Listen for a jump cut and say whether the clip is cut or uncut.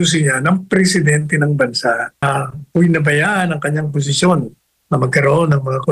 cut